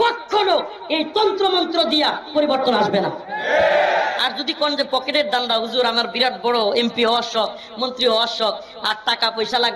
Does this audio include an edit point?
no; 0 cuts

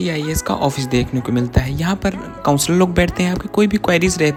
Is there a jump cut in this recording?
no; 0 cuts

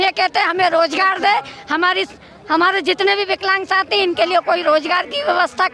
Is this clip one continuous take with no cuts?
yes; 0 cuts

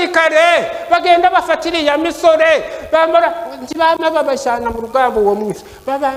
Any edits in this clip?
no; 0 cuts

